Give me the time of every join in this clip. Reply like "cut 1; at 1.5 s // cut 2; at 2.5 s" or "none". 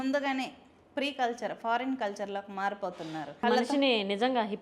cut 1; at 3.4 s

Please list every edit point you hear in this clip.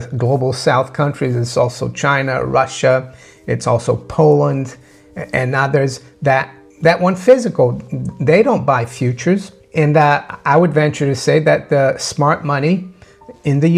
cut 1; at 6.6 s // cut 2; at 9.6 s

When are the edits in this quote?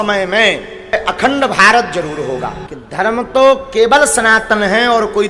none

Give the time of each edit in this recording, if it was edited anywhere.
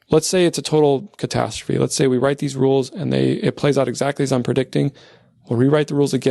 none

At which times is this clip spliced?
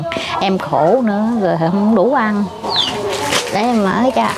cut 1; at 2.6 s

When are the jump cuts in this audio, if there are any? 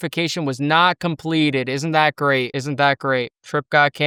none

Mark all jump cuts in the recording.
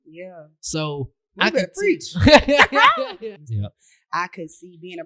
cut 1; at 3.7 s

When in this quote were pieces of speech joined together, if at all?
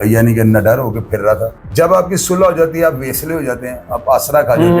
cut 1; at 1.6 s

